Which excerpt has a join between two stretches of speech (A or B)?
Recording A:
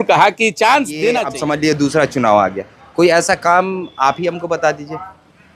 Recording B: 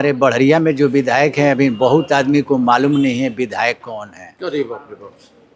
A